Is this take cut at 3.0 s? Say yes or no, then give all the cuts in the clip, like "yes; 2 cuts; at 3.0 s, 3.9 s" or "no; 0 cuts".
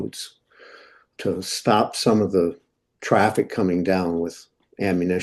no; 1 cut; at 1.1 s